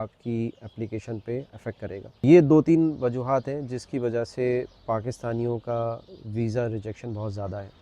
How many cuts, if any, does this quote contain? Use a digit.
1